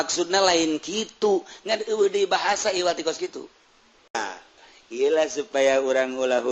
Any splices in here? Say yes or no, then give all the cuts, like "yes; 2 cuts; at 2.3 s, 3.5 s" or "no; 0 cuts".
yes; 1 cut; at 4.1 s